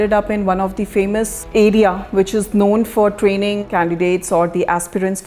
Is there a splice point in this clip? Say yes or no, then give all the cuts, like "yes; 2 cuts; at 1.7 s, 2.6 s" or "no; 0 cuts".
no; 0 cuts